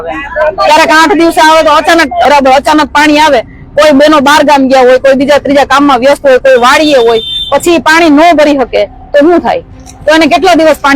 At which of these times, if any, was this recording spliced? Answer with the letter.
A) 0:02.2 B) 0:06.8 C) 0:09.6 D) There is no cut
A